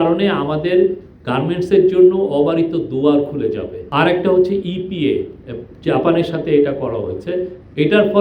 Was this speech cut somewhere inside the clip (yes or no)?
yes